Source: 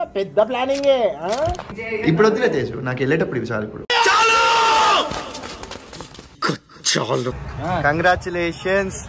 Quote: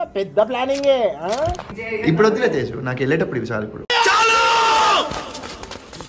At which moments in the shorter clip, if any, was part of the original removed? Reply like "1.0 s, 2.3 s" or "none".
none